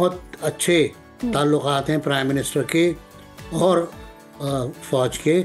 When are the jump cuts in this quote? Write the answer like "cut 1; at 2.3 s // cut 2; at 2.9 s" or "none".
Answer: none